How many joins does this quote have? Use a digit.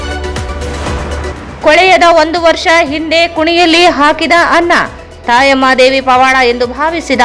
1